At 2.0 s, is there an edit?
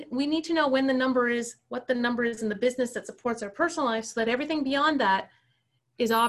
no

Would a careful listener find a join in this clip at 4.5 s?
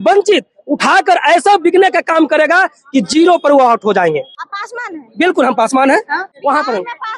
yes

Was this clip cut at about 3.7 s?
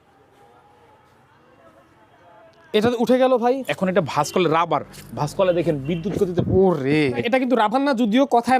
yes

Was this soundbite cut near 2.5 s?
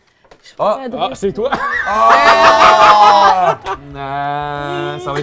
no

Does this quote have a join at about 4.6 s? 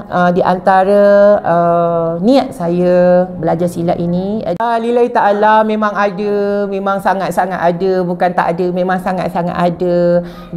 yes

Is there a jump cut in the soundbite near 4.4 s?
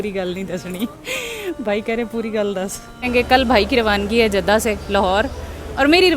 no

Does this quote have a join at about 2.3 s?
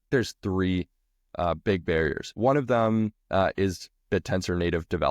yes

